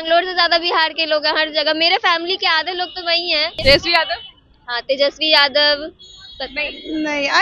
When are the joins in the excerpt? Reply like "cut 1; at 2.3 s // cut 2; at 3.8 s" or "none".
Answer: cut 1; at 3.6 s